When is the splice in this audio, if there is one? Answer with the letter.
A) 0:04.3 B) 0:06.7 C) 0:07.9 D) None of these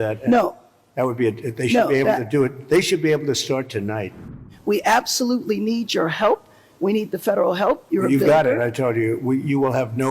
A